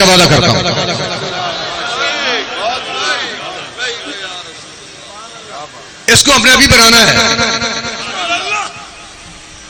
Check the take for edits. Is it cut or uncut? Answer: uncut